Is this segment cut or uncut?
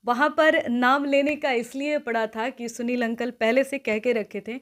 uncut